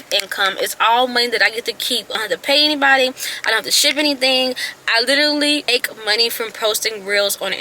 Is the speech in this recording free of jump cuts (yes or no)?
no